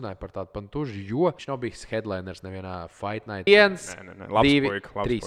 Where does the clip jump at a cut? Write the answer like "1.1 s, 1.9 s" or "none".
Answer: 1.4 s, 3.5 s